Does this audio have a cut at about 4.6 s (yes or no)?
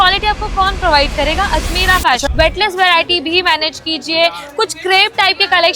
no